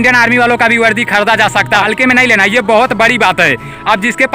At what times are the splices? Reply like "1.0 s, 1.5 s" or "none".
1.8 s